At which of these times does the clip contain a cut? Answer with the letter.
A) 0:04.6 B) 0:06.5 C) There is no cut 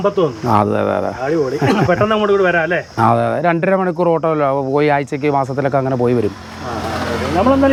C